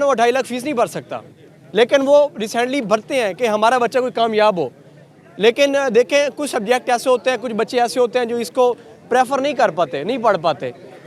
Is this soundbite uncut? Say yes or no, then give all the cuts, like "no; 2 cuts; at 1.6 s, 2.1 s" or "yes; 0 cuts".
yes; 0 cuts